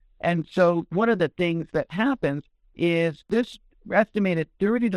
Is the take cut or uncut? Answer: cut